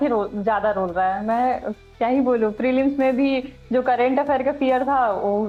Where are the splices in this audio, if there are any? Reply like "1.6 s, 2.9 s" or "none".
none